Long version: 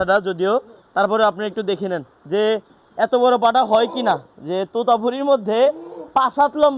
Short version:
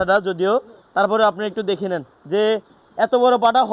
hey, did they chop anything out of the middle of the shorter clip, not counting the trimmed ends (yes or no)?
no